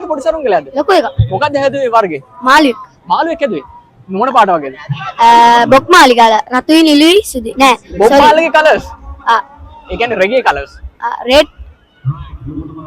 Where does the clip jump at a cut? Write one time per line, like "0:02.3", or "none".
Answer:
none

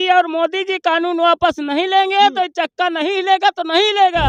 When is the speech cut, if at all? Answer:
none

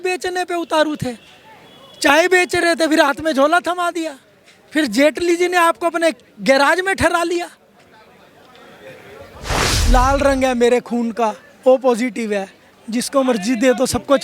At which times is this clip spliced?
0:09.7

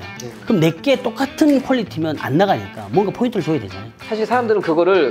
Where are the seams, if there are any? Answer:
none

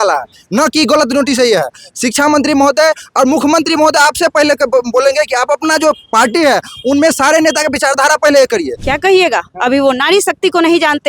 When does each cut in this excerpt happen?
0:08.8

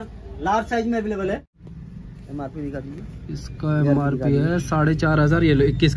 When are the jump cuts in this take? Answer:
0:01.5

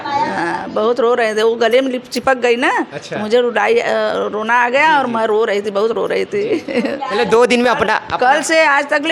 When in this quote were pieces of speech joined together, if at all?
none

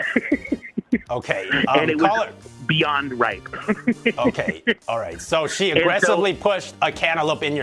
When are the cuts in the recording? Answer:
none

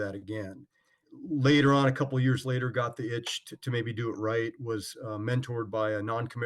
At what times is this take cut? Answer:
none

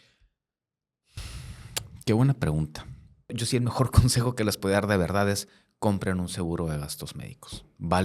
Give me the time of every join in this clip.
0:03.4

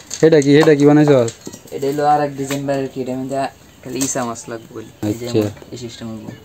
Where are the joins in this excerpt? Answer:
0:04.9

